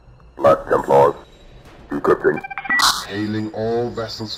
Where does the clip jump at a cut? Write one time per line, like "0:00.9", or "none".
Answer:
none